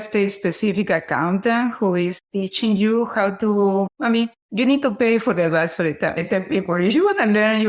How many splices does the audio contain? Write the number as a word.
one